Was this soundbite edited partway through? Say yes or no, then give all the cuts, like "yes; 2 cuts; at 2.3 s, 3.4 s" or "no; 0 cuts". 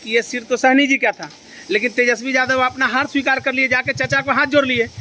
no; 0 cuts